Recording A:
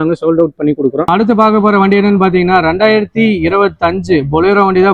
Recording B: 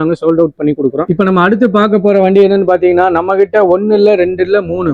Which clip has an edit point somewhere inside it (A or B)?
B